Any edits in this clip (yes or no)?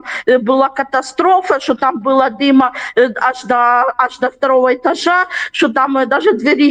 no